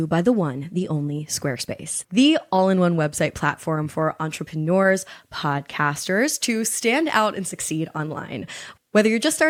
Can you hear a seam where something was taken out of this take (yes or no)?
no